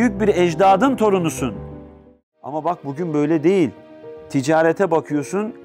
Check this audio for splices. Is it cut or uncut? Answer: cut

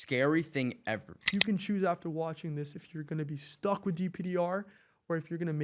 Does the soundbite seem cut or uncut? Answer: cut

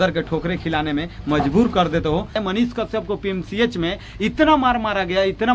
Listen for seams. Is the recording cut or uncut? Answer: cut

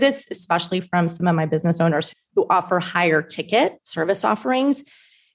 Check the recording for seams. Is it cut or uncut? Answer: cut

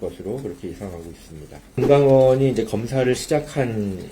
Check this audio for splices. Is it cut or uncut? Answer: cut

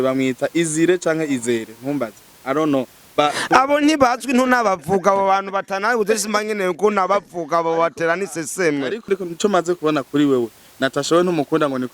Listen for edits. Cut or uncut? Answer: cut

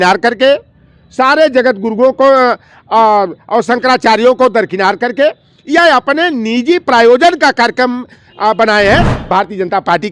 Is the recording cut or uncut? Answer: cut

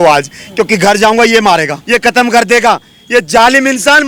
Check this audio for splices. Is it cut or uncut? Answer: cut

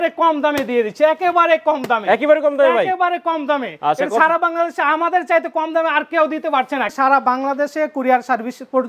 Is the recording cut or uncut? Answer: cut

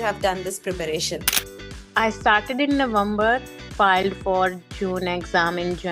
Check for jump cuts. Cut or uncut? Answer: cut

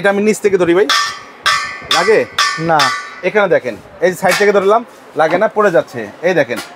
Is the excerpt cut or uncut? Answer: uncut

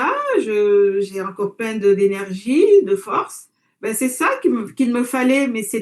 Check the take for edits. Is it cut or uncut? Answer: uncut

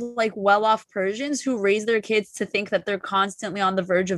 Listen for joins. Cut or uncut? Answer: uncut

